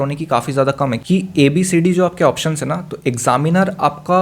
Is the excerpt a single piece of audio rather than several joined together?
no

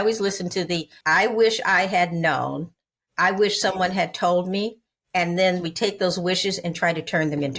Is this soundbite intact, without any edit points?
no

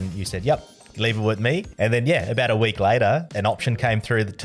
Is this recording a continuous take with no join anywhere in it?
no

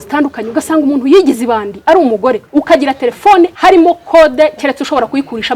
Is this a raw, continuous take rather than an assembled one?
no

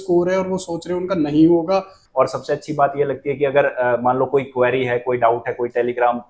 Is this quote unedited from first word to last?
no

